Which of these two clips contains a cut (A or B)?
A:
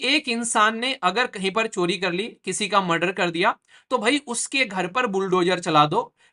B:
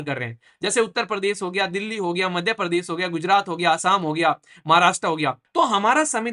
B